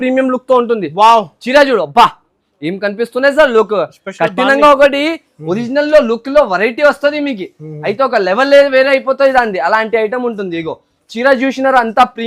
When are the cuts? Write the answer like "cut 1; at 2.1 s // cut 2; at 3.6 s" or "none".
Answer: none